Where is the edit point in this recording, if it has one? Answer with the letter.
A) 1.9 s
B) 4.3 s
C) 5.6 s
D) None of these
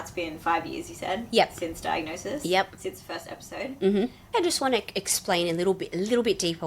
B